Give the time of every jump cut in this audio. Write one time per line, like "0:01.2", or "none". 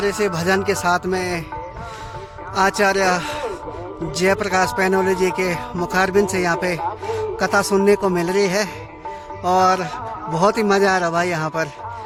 none